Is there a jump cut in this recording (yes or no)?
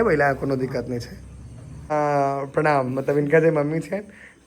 yes